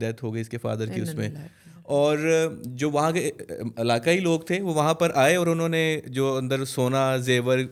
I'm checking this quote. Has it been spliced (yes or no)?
no